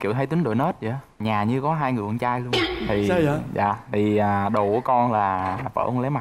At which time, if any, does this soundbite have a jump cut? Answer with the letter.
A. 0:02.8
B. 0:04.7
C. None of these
C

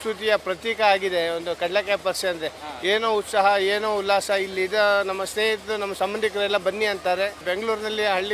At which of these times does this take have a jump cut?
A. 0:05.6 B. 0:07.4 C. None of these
B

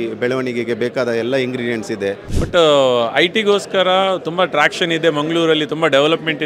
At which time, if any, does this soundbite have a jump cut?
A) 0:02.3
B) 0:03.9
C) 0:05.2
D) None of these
A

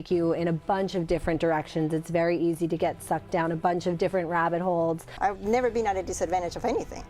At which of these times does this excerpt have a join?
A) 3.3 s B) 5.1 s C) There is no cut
B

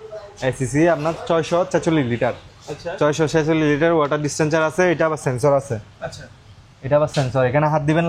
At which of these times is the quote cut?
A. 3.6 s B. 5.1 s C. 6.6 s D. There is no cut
D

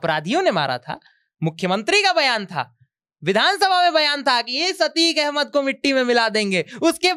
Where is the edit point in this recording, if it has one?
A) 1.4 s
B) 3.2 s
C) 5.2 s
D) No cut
D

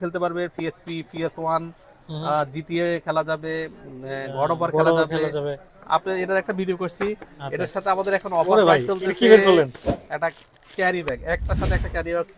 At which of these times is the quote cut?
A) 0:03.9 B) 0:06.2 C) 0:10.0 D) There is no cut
D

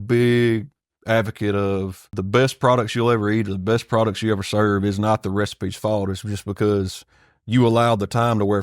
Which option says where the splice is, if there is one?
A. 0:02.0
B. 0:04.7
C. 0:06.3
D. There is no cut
A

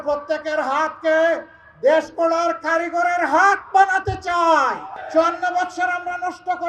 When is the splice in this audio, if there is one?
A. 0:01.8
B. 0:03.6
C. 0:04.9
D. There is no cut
C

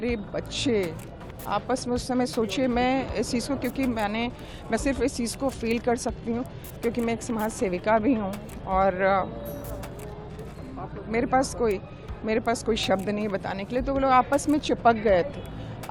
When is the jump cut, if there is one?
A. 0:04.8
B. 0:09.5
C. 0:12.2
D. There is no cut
D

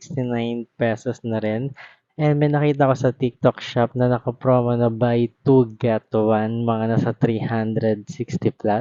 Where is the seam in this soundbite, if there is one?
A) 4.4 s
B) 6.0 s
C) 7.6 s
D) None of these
D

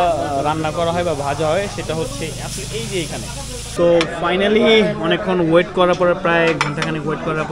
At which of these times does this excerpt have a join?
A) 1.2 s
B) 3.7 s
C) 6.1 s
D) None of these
B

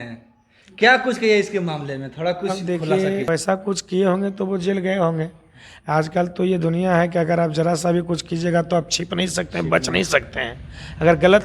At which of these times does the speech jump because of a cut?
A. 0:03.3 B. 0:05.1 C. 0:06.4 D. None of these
A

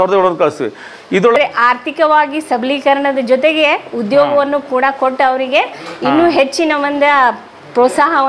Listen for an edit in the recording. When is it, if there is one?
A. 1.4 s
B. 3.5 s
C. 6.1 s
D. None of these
A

